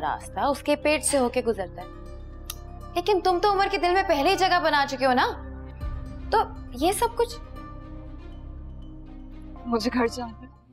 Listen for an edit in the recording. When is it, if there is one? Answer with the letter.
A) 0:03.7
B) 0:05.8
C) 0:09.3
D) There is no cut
C